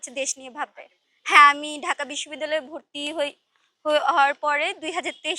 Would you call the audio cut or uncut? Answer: uncut